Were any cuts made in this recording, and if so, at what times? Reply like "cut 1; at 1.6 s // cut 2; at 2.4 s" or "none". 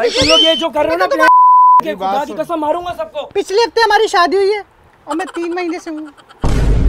cut 1; at 3.3 s